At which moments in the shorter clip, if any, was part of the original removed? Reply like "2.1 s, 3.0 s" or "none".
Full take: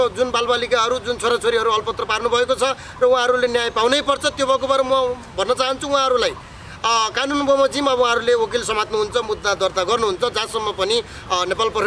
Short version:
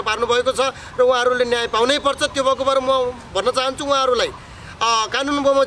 none